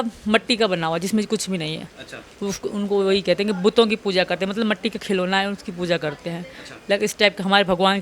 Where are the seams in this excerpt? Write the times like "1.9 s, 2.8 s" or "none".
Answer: none